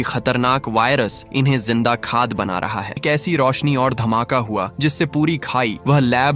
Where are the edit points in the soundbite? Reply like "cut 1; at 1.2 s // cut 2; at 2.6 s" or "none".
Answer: cut 1; at 3.0 s